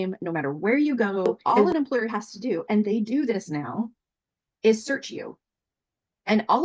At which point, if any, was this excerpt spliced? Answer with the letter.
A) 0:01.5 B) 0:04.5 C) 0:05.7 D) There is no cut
A